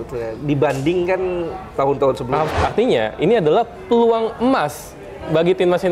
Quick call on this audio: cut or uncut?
cut